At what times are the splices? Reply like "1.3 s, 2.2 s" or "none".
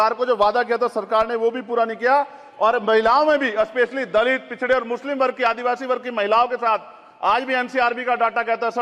none